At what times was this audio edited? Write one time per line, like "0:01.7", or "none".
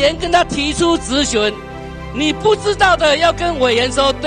none